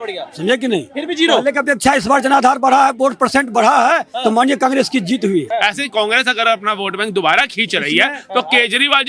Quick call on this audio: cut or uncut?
cut